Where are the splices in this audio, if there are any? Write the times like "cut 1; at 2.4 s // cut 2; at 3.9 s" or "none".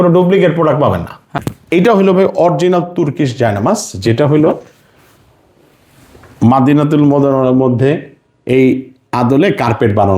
cut 1; at 1.3 s

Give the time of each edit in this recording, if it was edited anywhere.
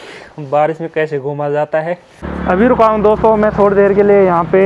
cut 1; at 2.1 s

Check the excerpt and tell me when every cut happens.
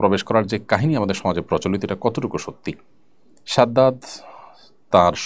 none

